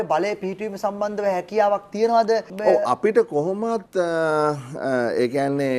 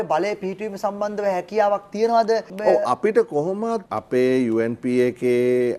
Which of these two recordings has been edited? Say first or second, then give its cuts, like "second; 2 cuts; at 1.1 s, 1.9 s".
second; 1 cut; at 3.9 s